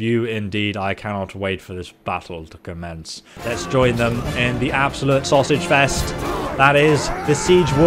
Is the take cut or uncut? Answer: cut